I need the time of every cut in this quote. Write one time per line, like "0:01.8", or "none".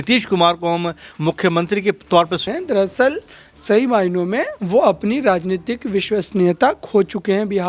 0:02.4